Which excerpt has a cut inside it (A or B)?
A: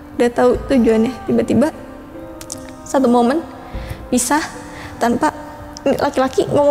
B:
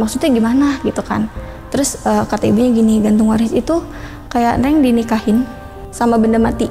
B